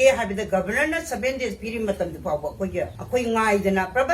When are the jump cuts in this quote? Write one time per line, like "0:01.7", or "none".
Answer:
0:03.0